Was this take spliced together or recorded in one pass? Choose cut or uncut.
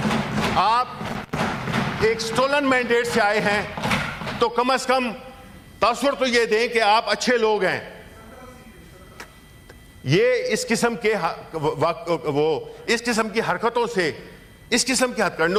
uncut